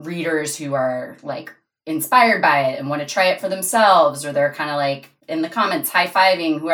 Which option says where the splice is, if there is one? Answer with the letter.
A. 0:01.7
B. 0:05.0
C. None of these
C